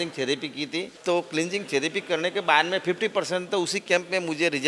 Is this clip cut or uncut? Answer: cut